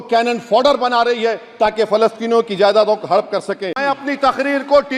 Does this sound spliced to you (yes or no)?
yes